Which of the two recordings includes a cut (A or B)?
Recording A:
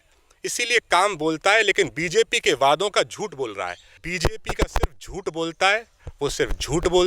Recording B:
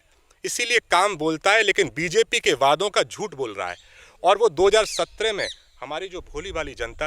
A